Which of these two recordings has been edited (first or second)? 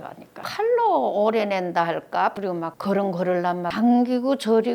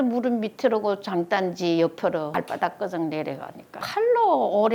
first